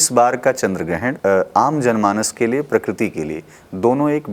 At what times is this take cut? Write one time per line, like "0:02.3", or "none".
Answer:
0:01.2